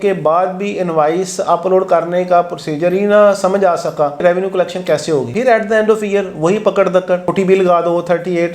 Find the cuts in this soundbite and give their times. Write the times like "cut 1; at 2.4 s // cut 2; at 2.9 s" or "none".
cut 1; at 4.2 s // cut 2; at 5.3 s